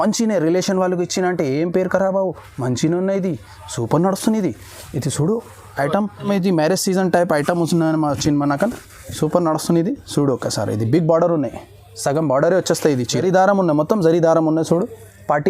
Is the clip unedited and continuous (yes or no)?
no